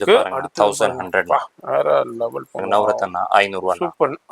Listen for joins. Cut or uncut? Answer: cut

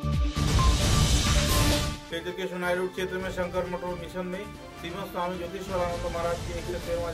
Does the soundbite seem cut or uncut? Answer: uncut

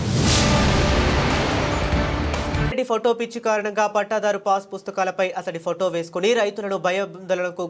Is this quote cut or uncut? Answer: cut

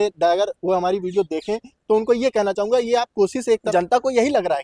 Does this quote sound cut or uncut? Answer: cut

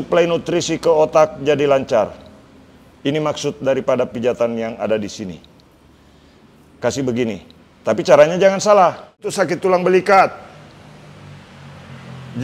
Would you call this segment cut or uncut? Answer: cut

